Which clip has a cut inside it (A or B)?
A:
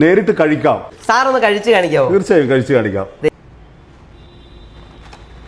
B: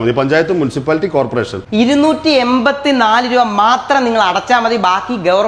A